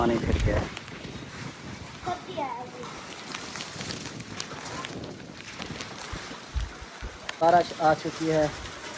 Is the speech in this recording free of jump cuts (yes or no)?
no